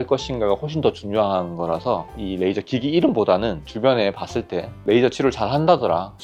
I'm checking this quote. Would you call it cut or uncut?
uncut